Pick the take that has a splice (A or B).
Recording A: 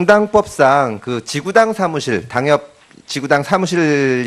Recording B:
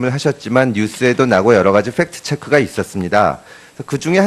A